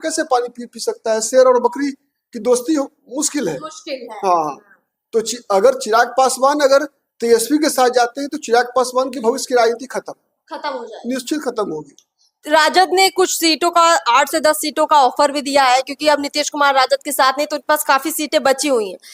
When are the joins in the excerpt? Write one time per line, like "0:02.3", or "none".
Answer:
none